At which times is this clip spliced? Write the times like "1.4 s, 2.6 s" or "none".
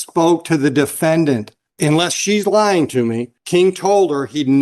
none